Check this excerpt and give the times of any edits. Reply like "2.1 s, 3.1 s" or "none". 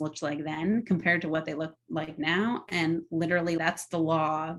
none